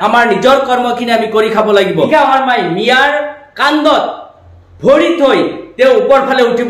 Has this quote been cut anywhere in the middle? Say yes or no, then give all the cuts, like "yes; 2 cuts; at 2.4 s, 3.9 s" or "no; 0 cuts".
yes; 1 cut; at 2.1 s